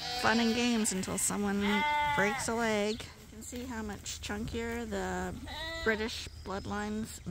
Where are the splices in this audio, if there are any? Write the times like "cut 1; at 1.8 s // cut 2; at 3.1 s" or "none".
cut 1; at 3.4 s

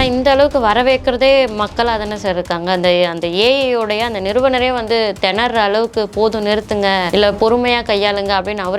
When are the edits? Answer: cut 1; at 7.1 s

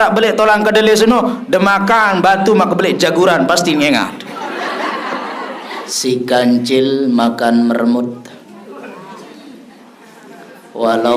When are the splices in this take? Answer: cut 1; at 5.6 s

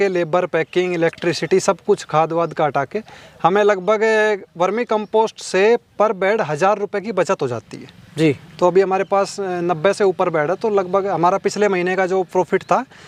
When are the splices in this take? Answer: none

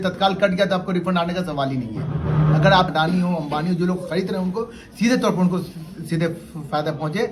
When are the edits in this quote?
cut 1; at 2.9 s

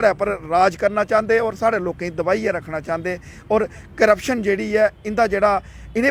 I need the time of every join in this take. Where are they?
none

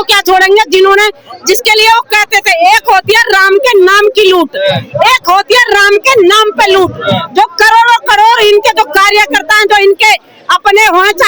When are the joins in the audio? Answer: none

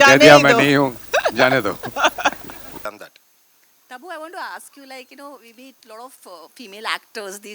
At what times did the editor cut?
cut 1; at 2.8 s

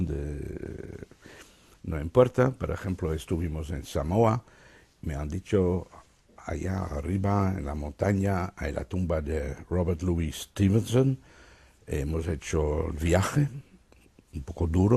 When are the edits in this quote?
cut 1; at 12.0 s

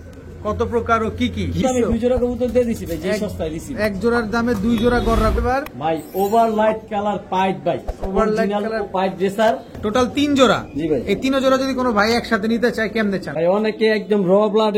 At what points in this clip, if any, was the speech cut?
cut 1; at 1.6 s // cut 2; at 5.4 s // cut 3; at 9.7 s // cut 4; at 13.3 s

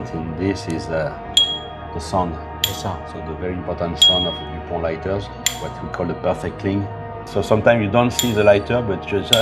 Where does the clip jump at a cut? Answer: cut 1; at 7.1 s

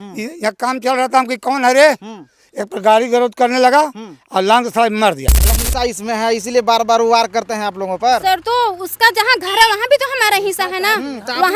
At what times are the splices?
cut 1; at 5.6 s

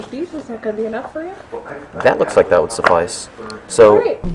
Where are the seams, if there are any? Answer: none

